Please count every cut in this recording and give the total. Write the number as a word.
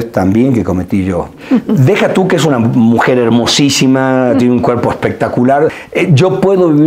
two